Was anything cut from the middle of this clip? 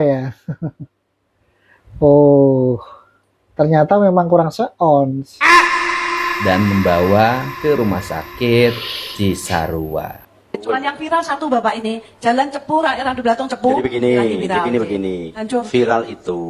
yes; 1 cut; at 10.2 s

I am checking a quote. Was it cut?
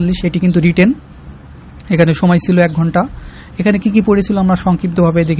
no; 0 cuts

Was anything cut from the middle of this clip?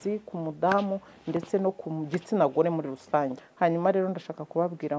yes; 1 cut; at 3.4 s

